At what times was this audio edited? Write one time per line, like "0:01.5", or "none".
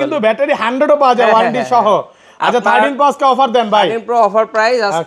none